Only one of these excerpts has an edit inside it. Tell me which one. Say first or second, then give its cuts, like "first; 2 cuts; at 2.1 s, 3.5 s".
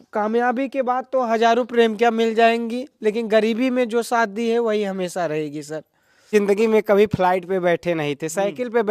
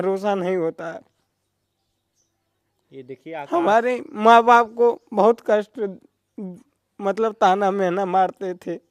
first; 1 cut; at 6.3 s